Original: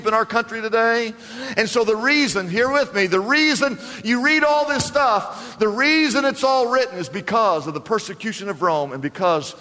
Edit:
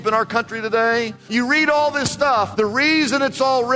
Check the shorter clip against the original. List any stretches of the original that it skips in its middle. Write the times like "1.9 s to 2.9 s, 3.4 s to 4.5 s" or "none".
1.2 s to 3.9 s, 5.2 s to 5.5 s